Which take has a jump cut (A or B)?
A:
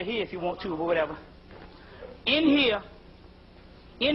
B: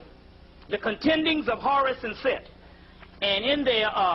A